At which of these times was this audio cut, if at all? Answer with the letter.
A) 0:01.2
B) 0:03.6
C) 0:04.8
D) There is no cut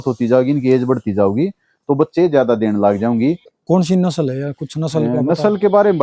B